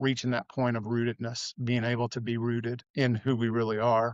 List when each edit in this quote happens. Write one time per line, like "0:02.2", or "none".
0:02.8